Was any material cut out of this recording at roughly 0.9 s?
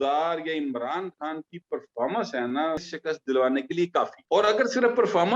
no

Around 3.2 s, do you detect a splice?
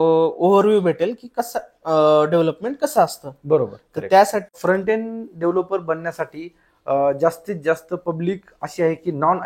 no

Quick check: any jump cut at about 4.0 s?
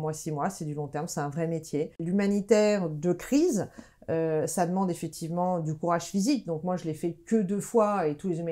no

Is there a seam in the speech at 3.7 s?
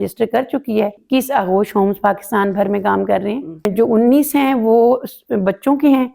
yes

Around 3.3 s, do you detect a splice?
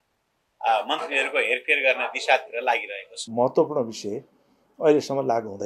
yes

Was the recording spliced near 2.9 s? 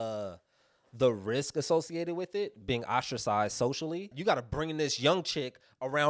no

